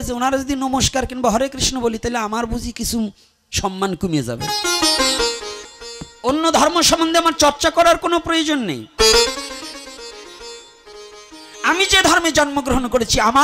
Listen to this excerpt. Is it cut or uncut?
cut